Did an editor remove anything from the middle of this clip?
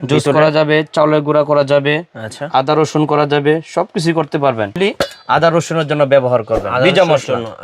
yes; 1 cut; at 4.7 s

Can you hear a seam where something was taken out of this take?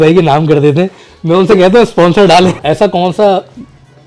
yes; 1 cut; at 2.6 s

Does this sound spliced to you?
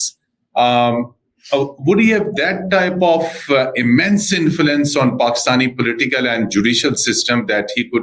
no; 0 cuts

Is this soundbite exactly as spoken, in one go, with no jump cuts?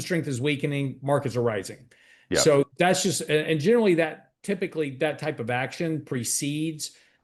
yes; 0 cuts

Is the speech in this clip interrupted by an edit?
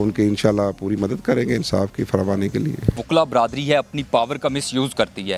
yes; 1 cut; at 3.0 s

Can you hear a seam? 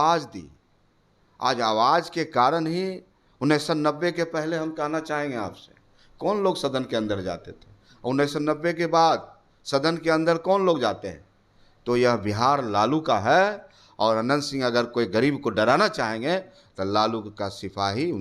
no; 0 cuts

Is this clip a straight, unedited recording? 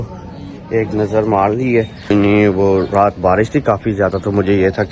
no; 1 cut; at 2.1 s

